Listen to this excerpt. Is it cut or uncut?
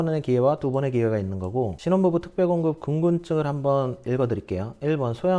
cut